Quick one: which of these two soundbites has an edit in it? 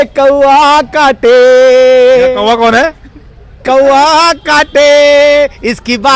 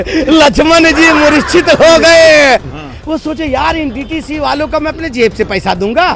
second; 1 cut; at 2.7 s

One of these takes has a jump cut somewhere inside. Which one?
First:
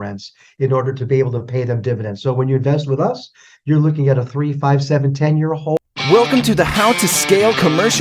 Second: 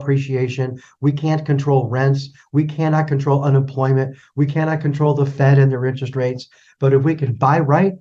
first; 1 cut; at 5.8 s

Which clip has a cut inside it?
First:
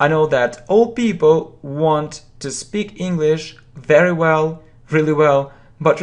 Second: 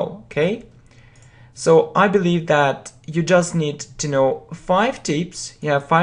second; 1 cut; at 1.7 s

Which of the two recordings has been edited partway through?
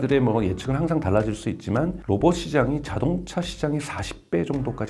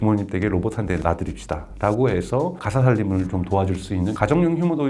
second; 3 cuts; at 1.0 s, 2.6 s, 4.1 s

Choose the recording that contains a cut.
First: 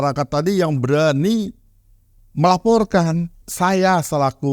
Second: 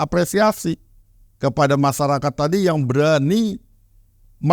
first; 1 cut; at 3.4 s

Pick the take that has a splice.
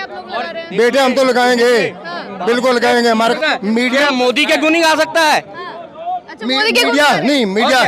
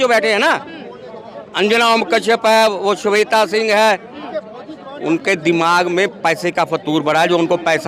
first; 1 cut; at 3.3 s

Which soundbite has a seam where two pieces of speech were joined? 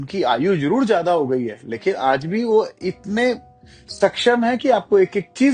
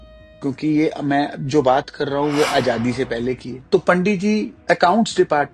second; 2 cuts; at 3.5 s, 4.5 s

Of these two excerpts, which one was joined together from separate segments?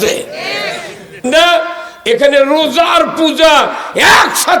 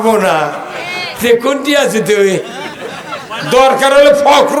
first; 1 cut; at 1.2 s

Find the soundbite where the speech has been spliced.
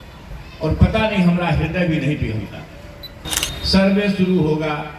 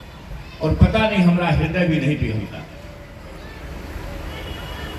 first; 1 cut; at 3.3 s

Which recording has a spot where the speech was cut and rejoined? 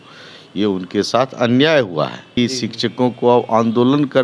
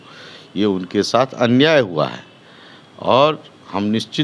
first; 1 cut; at 2.4 s

